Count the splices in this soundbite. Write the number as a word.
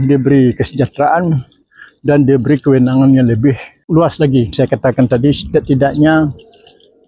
two